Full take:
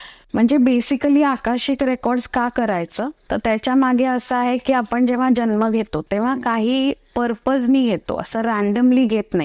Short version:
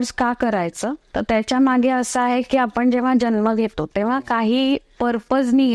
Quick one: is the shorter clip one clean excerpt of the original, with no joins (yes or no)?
yes